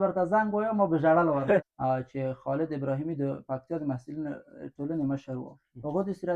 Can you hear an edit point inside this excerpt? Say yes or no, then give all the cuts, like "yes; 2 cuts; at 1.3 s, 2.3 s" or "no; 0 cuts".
yes; 1 cut; at 1.2 s